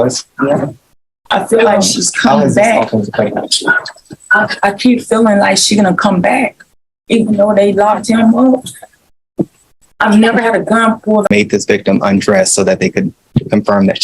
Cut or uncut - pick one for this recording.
cut